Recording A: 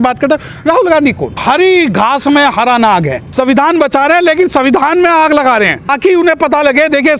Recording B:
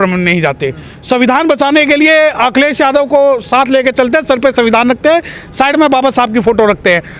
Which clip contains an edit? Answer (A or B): A